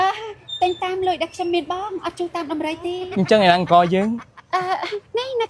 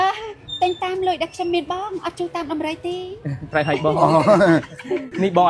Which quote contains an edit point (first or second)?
first